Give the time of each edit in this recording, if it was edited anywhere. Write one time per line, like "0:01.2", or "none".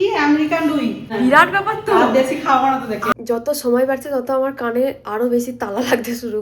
0:01.1
0:03.1

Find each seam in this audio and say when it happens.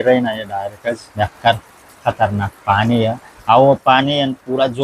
0:01.1
0:03.3

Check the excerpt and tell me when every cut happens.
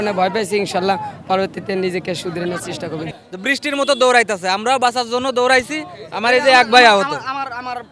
0:03.1

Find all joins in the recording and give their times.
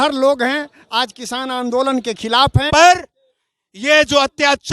0:02.7

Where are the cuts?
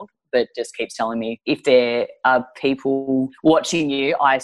0:01.3
0:03.3

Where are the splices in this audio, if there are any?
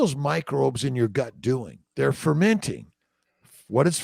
0:01.8

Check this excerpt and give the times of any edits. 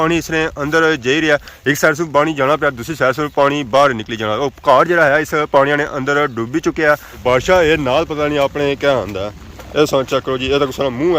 0:07.2

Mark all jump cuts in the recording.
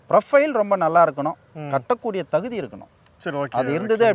none

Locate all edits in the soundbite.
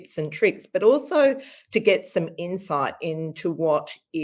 none

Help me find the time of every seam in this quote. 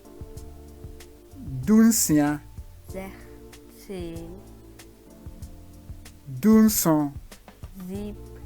none

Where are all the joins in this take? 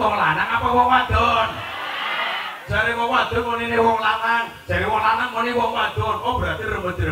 none

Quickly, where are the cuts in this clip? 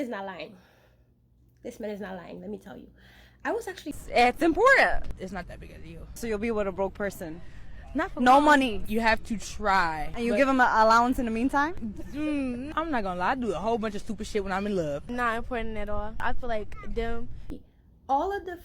0:03.9
0:17.5

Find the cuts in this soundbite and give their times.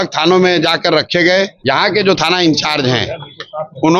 0:01.6

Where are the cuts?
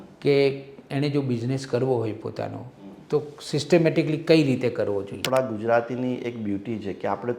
0:05.2

